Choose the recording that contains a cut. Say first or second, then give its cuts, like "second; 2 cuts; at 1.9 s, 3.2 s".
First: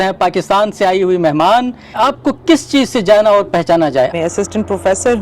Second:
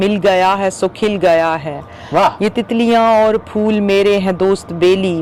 first; 2 cuts; at 1.9 s, 4.1 s